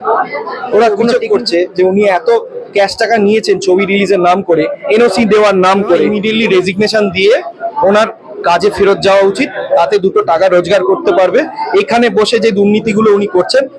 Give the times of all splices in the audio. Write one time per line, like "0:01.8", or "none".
0:01.1
0:06.1